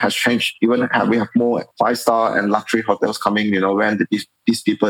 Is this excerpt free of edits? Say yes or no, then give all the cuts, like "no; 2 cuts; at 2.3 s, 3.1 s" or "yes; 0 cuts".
no; 1 cut; at 1.7 s